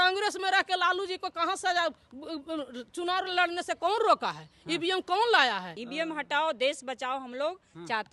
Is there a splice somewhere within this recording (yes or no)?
yes